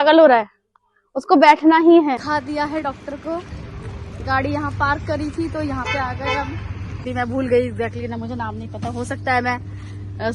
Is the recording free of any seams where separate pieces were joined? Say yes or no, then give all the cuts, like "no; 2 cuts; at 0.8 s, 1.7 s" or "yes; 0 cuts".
no; 2 cuts; at 2.2 s, 7.0 s